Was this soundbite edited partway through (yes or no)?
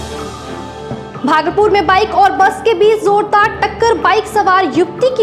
no